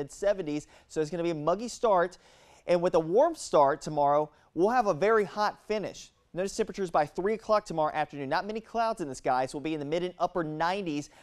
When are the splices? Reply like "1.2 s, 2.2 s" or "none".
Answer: none